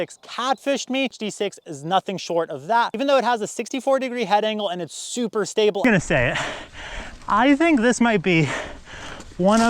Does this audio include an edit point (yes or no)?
yes